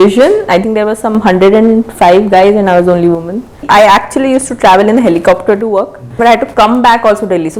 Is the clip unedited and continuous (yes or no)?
no